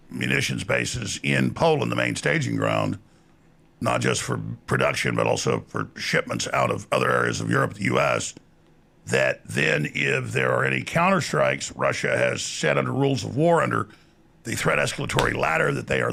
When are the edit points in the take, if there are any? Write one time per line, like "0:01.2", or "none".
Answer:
none